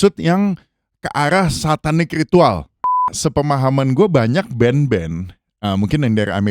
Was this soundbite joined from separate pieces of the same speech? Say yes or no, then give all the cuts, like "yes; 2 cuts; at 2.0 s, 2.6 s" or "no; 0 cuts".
yes; 1 cut; at 3.0 s